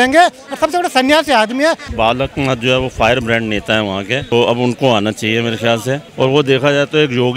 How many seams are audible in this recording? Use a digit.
3